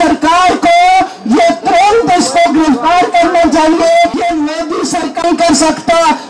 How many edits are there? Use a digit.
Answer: 1